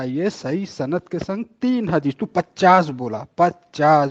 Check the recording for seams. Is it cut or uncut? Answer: uncut